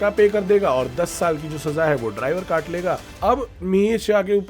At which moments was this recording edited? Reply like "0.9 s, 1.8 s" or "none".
3.1 s

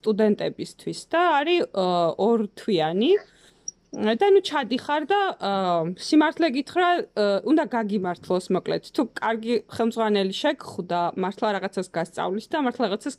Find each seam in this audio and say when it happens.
none

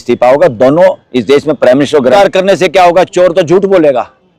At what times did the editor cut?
2.1 s

